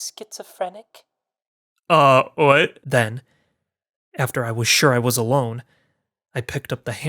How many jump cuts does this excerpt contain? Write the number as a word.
one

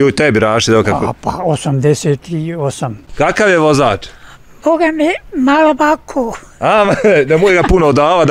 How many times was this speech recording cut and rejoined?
one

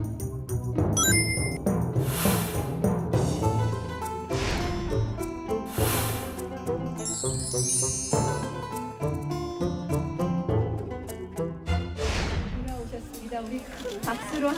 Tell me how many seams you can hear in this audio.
zero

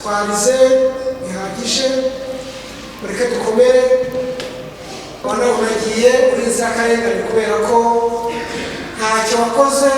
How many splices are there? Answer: one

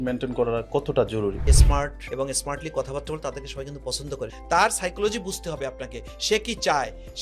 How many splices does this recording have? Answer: two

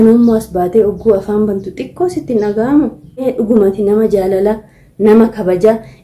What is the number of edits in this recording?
one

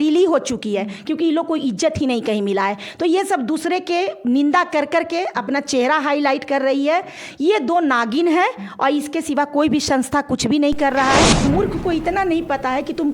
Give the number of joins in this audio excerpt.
one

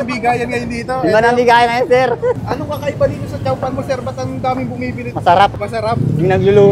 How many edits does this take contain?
three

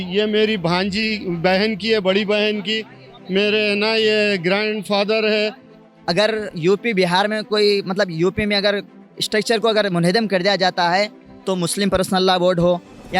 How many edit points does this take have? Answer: one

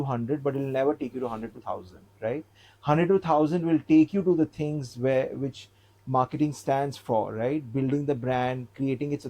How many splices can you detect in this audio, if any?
zero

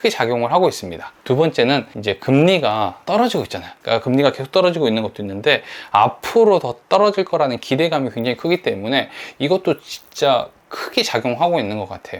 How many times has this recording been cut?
zero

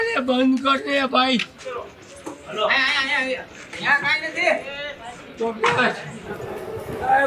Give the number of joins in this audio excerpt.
two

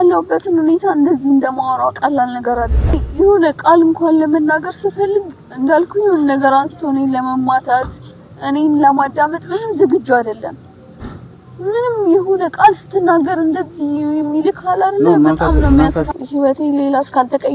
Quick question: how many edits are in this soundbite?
two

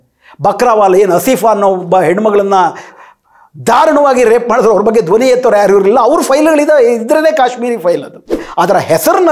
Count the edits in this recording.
one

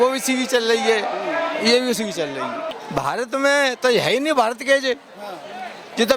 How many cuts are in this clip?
one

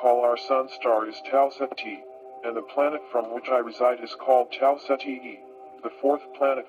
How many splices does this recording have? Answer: one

